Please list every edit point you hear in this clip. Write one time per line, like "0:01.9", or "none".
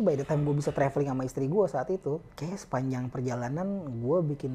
0:02.3